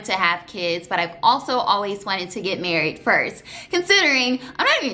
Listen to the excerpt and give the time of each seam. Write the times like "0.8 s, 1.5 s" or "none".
none